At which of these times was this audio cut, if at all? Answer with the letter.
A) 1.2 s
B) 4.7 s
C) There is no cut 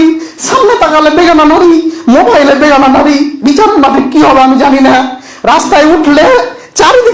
C